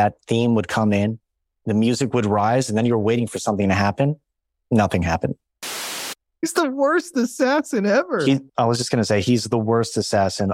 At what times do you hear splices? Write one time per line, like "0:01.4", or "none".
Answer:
0:05.9